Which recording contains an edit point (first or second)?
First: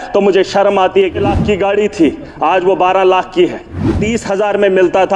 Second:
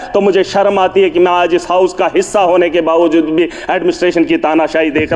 first